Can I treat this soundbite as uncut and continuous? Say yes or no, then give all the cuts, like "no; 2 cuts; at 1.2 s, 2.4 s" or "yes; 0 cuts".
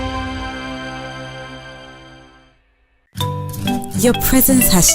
no; 1 cut; at 1.3 s